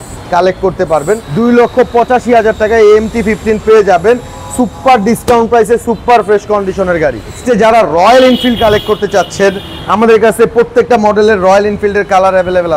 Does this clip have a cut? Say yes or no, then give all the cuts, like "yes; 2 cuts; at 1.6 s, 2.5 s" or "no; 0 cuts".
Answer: yes; 2 cuts; at 1.3 s, 7.4 s